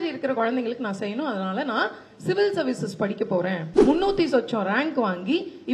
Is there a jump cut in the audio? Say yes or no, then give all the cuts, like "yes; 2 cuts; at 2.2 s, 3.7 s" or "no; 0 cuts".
yes; 1 cut; at 3.7 s